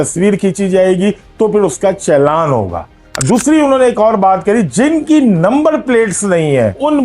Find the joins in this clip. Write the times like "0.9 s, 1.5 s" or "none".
none